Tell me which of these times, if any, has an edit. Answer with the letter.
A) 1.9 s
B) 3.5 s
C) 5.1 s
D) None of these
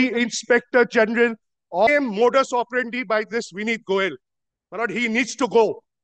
A